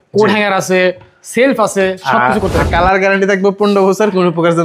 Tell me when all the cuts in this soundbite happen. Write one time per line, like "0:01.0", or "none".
0:02.6